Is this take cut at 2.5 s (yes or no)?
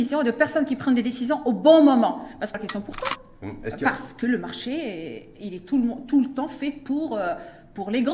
yes